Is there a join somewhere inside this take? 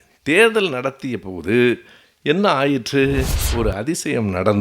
yes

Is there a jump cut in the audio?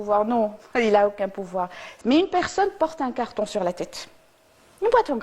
yes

